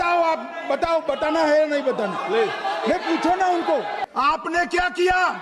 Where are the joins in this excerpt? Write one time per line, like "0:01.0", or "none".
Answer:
0:04.0